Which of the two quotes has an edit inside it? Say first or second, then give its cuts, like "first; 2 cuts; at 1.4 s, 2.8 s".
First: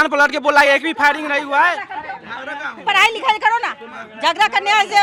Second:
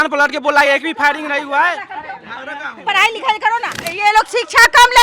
second; 1 cut; at 3.8 s